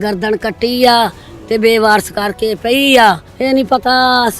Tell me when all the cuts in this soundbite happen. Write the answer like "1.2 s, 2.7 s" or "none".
3.3 s